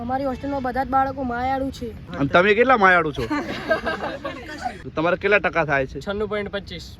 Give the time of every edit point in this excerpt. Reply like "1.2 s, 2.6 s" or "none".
2.0 s, 4.8 s